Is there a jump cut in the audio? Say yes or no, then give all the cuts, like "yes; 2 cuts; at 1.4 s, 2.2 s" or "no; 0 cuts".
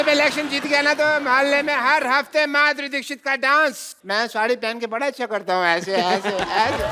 yes; 1 cut; at 3.9 s